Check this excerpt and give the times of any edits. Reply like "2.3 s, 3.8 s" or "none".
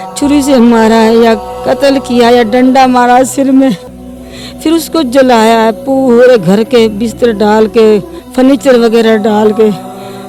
none